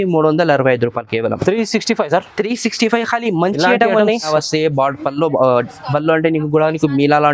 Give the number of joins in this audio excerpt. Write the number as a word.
one